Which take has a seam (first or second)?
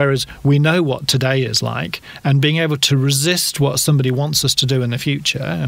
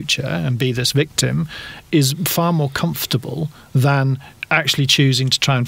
second